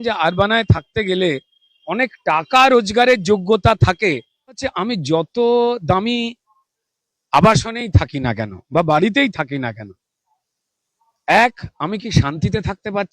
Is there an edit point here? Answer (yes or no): yes